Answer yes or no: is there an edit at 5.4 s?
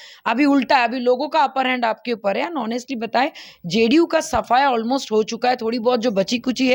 no